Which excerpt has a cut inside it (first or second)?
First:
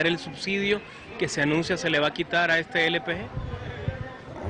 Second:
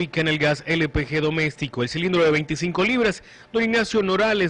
first